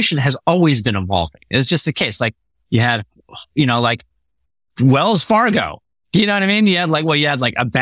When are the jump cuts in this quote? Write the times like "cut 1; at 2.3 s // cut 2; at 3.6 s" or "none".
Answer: none